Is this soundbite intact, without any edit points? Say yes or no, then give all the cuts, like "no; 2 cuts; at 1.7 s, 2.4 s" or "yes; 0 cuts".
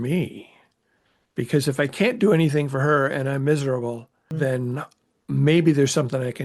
no; 1 cut; at 4.3 s